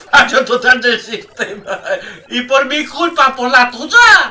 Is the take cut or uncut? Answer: uncut